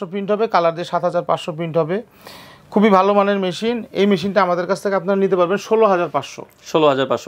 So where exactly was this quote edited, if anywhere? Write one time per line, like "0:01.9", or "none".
none